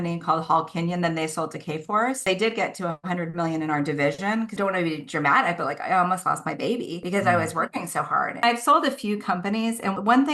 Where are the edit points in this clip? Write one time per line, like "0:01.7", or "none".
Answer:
0:04.5
0:08.4